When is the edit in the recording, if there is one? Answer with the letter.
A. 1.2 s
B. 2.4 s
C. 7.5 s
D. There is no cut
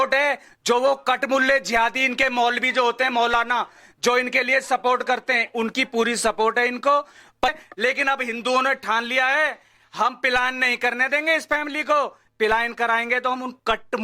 C